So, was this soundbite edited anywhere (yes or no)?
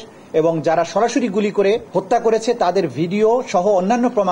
yes